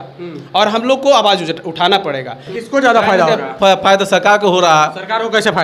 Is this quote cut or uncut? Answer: cut